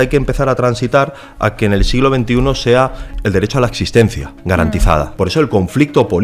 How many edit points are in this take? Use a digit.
2